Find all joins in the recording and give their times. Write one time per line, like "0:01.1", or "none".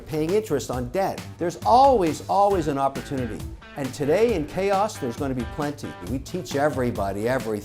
0:01.3
0:05.9